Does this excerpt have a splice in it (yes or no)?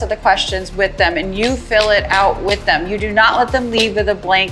no